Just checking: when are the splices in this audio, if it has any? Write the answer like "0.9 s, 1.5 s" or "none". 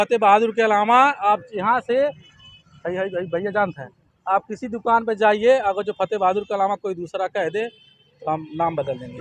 none